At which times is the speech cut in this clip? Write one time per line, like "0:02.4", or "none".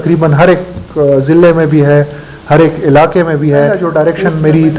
0:03.9